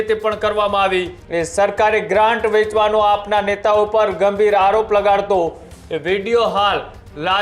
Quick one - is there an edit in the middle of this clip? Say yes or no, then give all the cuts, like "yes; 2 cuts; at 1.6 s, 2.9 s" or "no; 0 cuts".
yes; 1 cut; at 1.2 s